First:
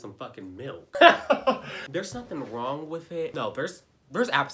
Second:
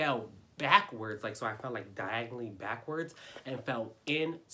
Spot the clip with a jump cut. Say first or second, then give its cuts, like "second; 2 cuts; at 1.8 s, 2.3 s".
first; 3 cuts; at 0.9 s, 1.7 s, 3.3 s